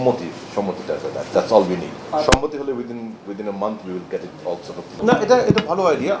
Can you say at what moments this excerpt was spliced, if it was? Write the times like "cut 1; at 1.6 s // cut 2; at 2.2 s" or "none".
none